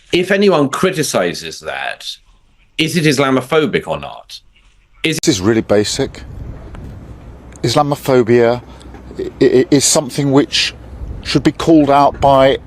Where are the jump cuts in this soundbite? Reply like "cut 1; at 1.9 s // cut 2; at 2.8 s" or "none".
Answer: cut 1; at 5.1 s